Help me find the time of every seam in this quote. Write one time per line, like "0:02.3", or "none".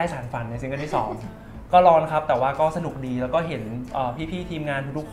none

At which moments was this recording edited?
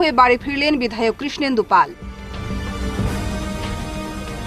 none

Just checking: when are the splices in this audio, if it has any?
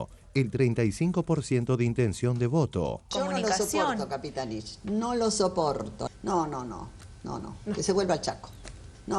0:03.1
0:05.9

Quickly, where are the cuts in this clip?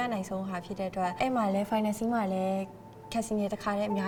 none

